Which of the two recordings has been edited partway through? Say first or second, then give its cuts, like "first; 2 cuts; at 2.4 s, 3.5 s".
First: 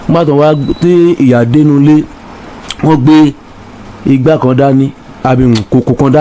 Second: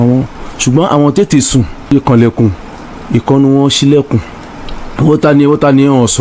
second; 1 cut; at 1.9 s